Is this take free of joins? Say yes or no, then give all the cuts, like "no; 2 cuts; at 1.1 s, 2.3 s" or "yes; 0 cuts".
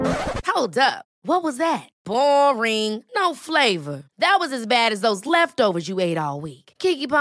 yes; 0 cuts